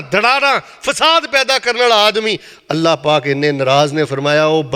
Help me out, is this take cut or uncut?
uncut